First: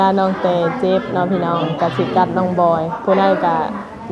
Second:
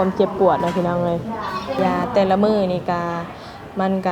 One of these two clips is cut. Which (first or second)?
second